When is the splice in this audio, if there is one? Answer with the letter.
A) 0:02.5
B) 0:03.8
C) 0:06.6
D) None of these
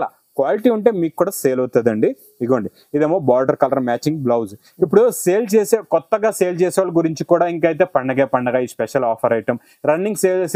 D